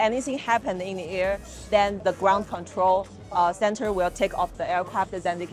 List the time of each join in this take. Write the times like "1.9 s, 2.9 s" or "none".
none